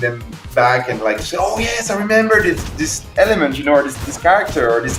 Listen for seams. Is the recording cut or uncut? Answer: uncut